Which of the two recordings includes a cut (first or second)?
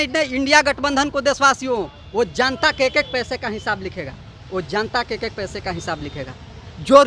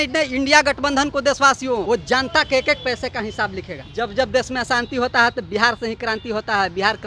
second